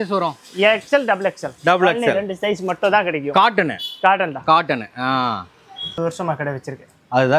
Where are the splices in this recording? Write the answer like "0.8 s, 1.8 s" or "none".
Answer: 5.9 s